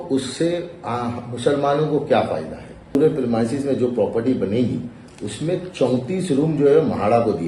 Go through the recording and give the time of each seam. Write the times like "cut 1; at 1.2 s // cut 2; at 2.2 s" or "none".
cut 1; at 2.9 s